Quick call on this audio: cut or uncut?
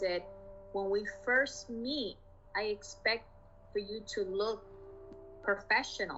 uncut